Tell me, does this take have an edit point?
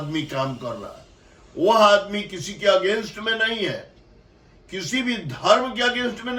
no; 0 cuts

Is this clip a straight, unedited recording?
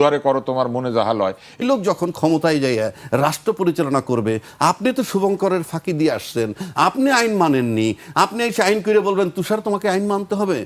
no; 1 cut; at 1.6 s

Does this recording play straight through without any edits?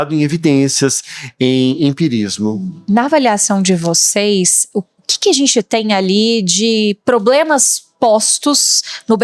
yes; 0 cuts

